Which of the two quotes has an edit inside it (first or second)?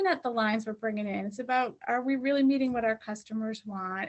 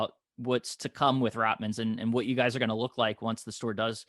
first